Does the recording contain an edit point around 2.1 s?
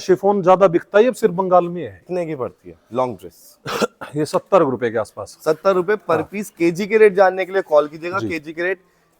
yes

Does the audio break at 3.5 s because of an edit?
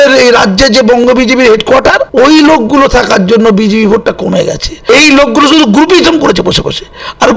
no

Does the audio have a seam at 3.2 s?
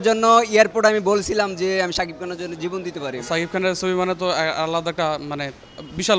yes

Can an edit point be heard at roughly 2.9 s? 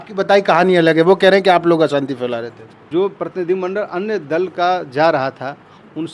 yes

